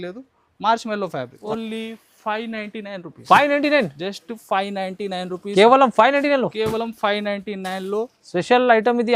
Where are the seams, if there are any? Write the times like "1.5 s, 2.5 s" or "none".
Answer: 1.4 s